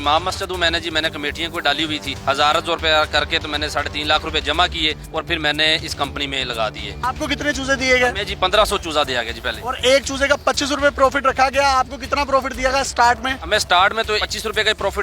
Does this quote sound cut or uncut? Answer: uncut